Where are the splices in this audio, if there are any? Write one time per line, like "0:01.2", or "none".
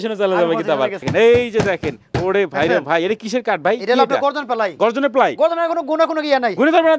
0:01.0